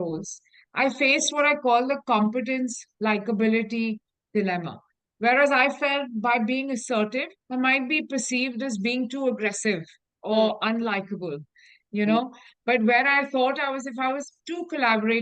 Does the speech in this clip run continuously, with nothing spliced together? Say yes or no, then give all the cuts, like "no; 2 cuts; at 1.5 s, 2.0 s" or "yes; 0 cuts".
yes; 0 cuts